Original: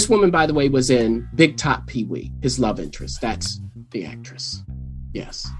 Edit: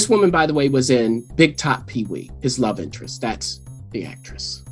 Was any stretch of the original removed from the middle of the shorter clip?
no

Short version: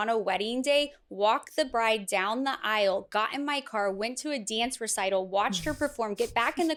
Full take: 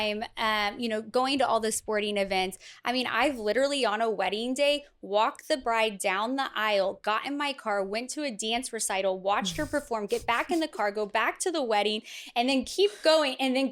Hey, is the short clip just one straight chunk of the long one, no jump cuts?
yes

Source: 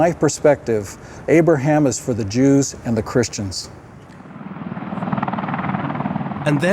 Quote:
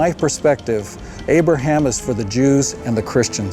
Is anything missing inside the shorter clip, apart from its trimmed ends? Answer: no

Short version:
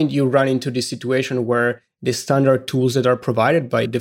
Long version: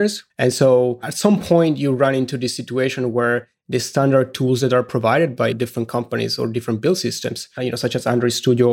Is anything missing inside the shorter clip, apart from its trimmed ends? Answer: no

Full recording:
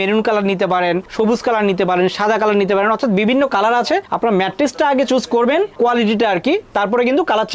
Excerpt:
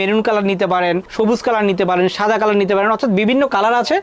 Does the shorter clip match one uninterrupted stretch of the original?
yes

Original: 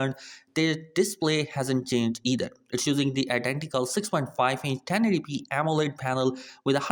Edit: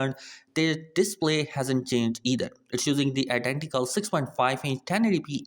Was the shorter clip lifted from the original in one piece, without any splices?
yes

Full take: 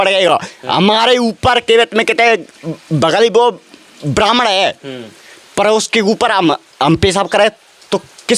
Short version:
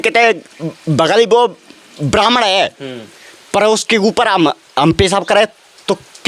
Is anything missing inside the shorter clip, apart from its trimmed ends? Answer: no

